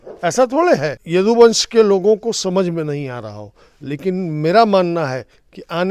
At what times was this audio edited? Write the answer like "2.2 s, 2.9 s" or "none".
1.0 s